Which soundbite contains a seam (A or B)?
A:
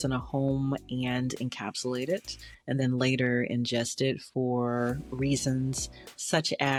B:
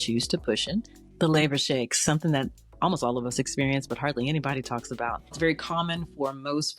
B